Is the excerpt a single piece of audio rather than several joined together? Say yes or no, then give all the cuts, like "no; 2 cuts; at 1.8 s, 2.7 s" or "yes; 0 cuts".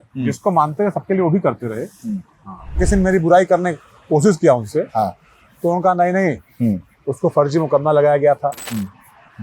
no; 1 cut; at 2.8 s